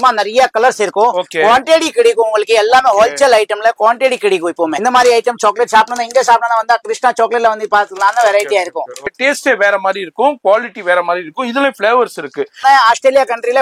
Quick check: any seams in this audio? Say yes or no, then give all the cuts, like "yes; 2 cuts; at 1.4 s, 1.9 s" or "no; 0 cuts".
yes; 3 cuts; at 4.8 s, 9.2 s, 12.6 s